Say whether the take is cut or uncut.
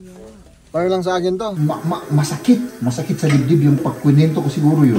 cut